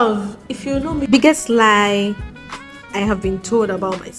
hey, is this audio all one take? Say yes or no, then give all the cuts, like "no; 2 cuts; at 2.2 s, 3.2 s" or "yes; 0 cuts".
no; 1 cut; at 1.0 s